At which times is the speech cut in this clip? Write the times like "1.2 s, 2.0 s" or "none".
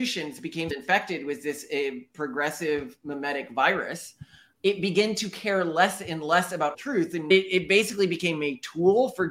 7.3 s

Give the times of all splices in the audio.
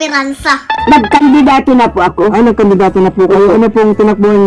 none

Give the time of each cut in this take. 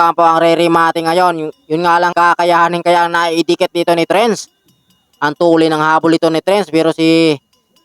2.1 s

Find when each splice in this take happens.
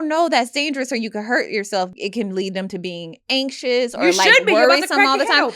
1.9 s

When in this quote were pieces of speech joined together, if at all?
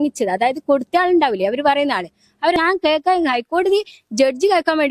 2.6 s

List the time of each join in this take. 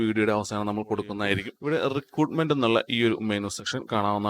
1.5 s

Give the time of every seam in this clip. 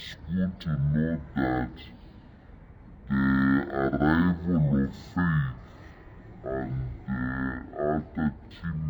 none

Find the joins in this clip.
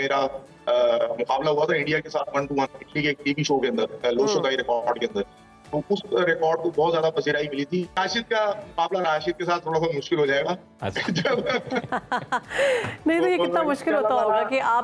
8.0 s

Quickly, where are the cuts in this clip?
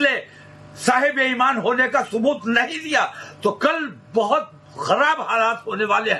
none

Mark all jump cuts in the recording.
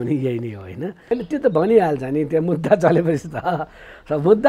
1.0 s

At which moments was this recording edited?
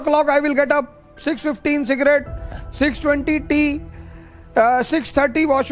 none

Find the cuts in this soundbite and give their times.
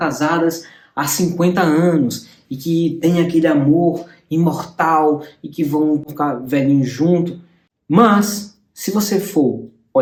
none

